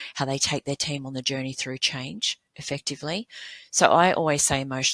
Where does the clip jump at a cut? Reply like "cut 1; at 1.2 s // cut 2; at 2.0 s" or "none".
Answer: none